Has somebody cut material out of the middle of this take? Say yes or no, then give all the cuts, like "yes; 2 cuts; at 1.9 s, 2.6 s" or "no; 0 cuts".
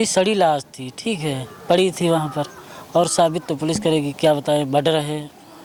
no; 0 cuts